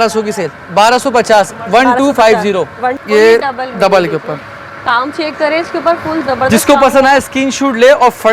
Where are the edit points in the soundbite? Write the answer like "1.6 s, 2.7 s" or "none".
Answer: 3.0 s